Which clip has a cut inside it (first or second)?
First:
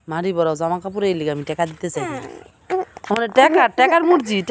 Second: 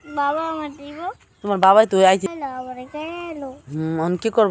second